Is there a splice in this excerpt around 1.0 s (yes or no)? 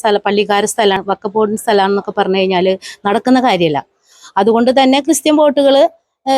yes